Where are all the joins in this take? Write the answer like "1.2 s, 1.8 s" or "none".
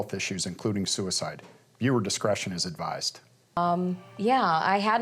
3.6 s